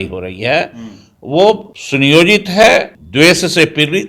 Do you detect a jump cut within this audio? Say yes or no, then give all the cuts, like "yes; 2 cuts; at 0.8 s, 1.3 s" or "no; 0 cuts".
yes; 2 cuts; at 1.8 s, 3.0 s